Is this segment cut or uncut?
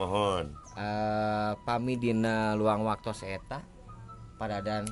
uncut